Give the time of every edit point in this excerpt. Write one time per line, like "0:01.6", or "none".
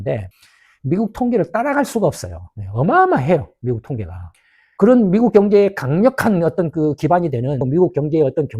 0:07.6